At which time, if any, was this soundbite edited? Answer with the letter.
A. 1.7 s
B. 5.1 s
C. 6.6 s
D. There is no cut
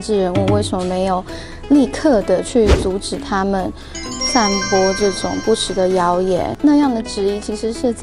C